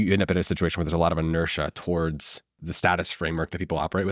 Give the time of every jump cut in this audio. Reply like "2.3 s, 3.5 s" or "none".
2.6 s